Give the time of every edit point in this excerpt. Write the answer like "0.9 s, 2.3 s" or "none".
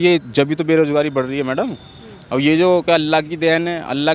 none